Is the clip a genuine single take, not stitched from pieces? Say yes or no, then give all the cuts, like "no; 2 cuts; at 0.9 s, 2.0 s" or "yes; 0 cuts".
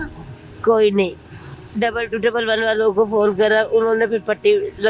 yes; 0 cuts